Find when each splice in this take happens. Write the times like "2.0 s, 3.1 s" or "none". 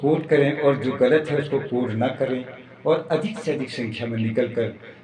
none